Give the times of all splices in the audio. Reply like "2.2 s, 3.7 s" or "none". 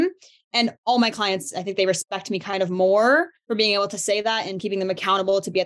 3.4 s, 4.6 s

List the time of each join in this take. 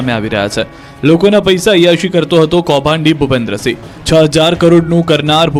none

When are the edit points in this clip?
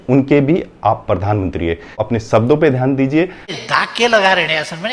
3.3 s

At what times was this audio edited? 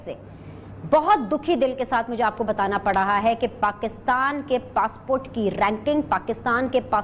none

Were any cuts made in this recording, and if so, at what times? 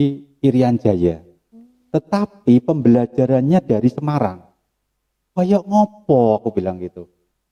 none

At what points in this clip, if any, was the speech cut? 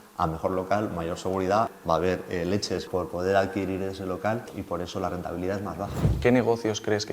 1.8 s, 2.9 s, 4.5 s, 6.1 s

